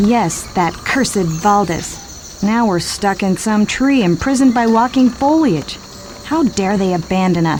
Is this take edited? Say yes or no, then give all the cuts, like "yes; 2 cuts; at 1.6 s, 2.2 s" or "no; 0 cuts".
no; 0 cuts